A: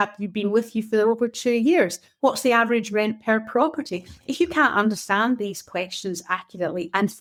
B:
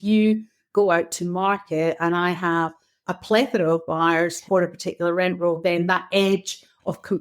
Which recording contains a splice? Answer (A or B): B